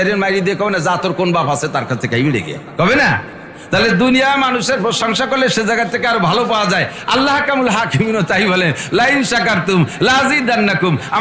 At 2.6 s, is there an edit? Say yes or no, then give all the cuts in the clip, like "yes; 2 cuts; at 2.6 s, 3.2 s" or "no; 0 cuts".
yes; 1 cut; at 2.6 s